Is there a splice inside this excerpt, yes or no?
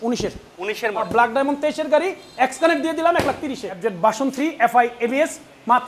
yes